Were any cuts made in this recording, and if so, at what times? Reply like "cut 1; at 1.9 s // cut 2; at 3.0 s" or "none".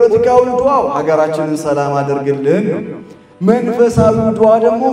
none